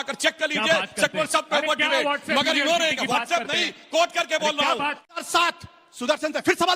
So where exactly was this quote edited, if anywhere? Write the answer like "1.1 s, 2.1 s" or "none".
5.2 s